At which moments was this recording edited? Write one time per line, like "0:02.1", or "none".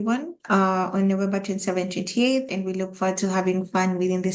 0:02.5